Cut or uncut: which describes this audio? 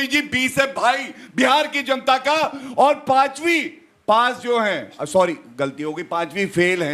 uncut